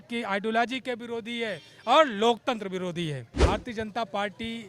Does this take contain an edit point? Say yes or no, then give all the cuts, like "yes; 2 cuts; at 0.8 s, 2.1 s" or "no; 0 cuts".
yes; 1 cut; at 3.3 s